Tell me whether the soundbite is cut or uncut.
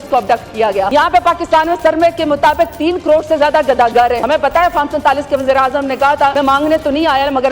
cut